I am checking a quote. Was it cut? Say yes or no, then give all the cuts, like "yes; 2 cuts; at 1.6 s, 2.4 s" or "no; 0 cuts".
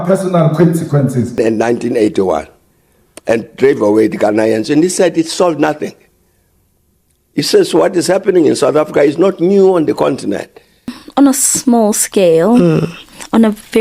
yes; 2 cuts; at 1.4 s, 11.0 s